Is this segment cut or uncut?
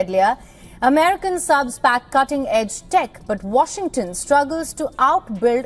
uncut